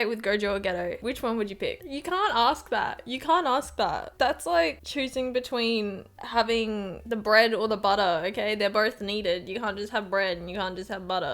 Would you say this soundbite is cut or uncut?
cut